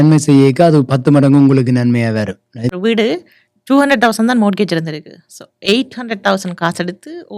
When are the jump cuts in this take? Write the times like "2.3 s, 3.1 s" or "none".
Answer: 2.7 s